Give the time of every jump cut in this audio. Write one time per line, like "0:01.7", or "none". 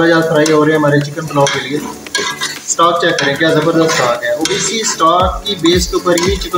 0:02.0